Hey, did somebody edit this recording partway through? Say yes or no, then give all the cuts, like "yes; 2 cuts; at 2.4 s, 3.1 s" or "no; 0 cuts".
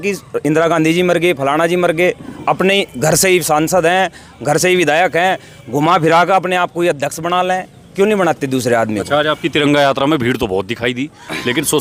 no; 0 cuts